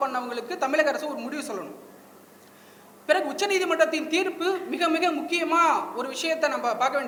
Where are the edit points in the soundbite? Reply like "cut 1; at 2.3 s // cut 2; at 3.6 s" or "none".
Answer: none

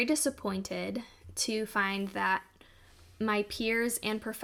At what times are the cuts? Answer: none

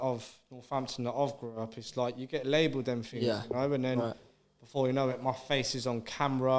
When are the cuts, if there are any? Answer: none

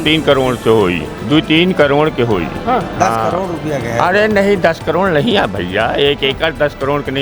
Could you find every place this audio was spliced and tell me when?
none

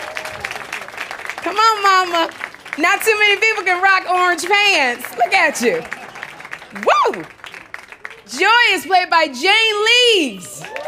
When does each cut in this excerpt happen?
cut 1; at 9.4 s

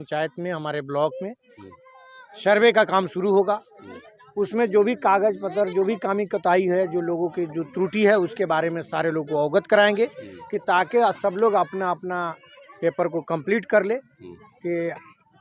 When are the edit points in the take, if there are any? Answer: none

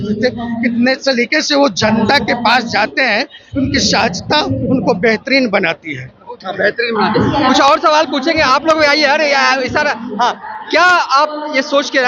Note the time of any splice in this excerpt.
none

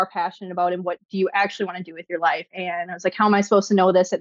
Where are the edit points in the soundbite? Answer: cut 1; at 2.6 s

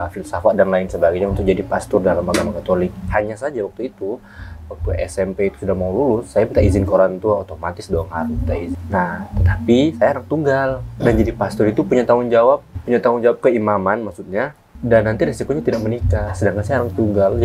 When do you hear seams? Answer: cut 1; at 8.8 s // cut 2; at 12.7 s // cut 3; at 14.7 s

